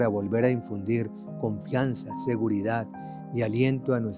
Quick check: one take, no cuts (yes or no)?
yes